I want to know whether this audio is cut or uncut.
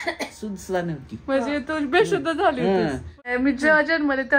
cut